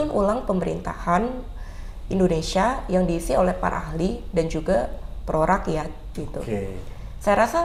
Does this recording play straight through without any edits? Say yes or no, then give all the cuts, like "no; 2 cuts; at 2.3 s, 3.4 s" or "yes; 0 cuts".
yes; 0 cuts